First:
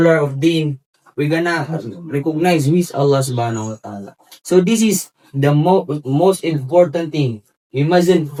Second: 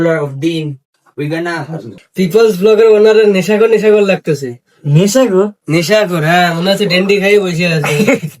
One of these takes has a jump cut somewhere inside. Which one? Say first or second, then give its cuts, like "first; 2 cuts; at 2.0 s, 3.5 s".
second; 1 cut; at 2.0 s